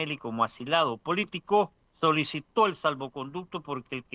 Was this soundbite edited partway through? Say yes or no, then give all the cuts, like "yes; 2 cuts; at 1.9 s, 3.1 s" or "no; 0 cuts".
yes; 1 cut; at 1.8 s